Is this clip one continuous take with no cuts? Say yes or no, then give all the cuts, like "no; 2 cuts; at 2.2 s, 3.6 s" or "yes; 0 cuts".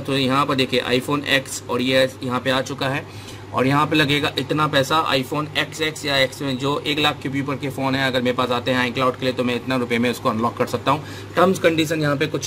yes; 0 cuts